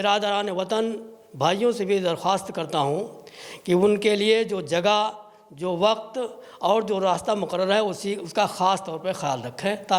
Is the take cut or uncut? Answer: uncut